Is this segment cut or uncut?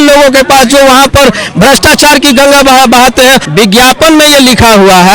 cut